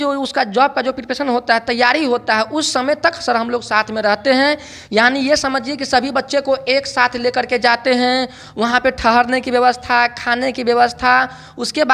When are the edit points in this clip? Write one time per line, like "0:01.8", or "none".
none